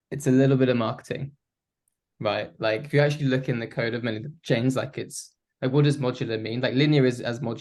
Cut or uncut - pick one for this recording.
uncut